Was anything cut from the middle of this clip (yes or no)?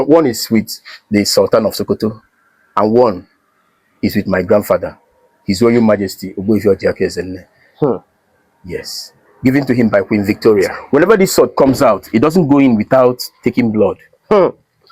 yes